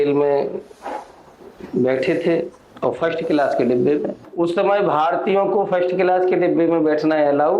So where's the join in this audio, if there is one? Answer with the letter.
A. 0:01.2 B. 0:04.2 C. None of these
B